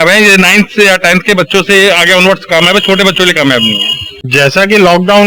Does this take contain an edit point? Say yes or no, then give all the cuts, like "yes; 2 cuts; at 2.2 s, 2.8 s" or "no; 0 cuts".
yes; 1 cut; at 4.2 s